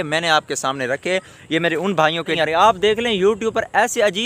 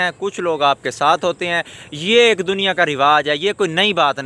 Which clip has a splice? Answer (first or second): first